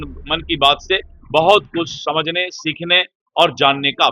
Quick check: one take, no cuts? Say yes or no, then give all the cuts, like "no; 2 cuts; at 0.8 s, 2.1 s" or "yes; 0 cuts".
yes; 0 cuts